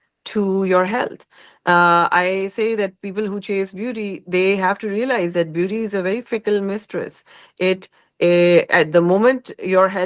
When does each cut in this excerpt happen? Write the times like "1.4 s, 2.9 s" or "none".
none